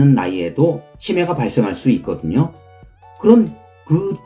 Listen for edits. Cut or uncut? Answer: cut